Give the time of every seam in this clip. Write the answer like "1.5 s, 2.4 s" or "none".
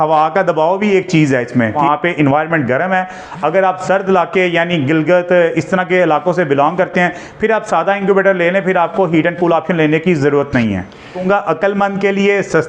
1.7 s, 11.2 s